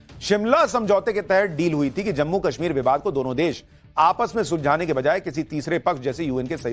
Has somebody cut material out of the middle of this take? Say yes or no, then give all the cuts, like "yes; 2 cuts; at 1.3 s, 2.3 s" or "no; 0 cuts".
no; 0 cuts